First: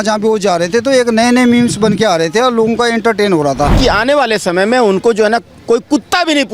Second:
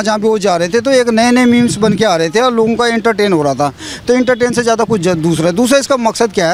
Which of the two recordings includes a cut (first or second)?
first